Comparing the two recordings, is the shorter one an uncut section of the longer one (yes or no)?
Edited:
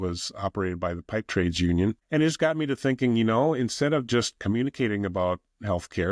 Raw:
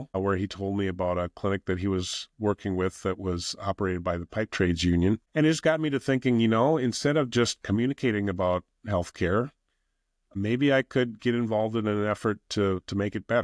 yes